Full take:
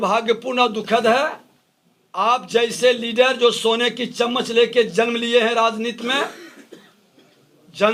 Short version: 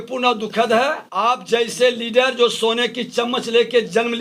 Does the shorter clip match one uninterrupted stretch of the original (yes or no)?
no